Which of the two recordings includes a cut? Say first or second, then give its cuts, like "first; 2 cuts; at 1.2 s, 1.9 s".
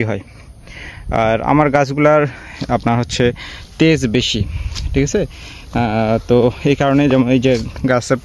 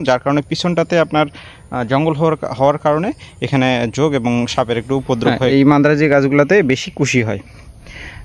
second; 1 cut; at 5.4 s